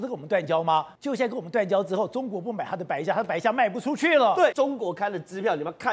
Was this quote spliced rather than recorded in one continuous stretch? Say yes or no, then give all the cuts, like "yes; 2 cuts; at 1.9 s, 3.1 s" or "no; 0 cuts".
yes; 2 cuts; at 0.9 s, 4.5 s